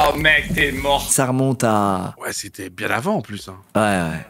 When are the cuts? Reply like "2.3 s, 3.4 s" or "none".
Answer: 1.1 s, 2.2 s